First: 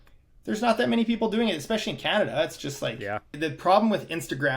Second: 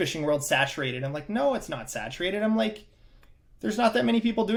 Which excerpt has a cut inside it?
first; 1 cut; at 3.3 s

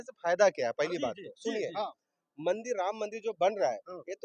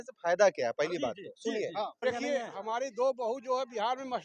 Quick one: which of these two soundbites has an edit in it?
second; 1 cut; at 2.0 s

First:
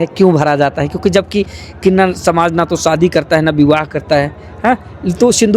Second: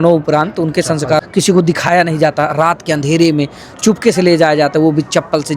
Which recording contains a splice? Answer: second; 1 cut; at 1.2 s

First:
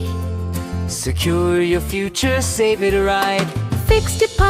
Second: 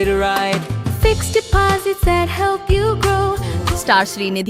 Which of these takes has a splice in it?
second; 1 cut; at 3.5 s

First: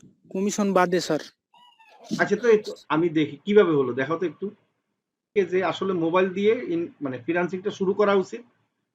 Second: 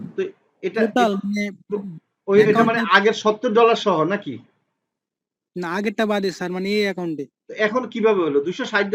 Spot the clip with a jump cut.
first; 1 cut; at 5.3 s

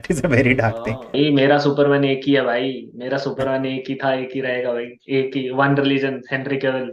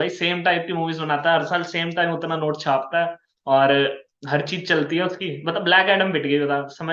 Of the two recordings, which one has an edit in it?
first; 1 cut; at 1.1 s

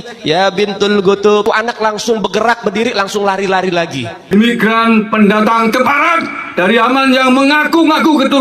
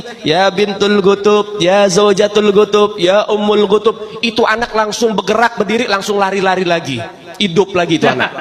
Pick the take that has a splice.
first; 2 cuts; at 1.2 s, 4.3 s

